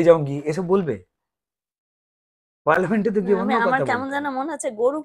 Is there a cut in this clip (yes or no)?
no